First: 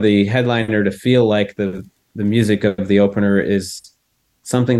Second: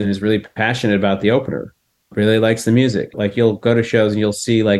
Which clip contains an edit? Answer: second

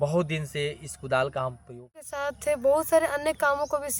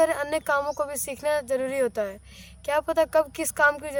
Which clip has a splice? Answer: first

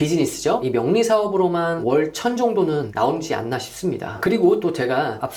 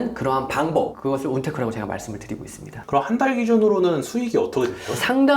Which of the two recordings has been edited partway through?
second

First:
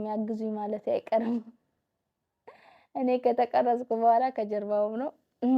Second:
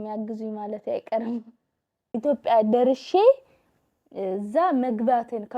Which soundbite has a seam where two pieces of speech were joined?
second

